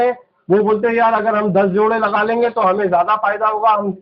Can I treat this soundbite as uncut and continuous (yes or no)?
yes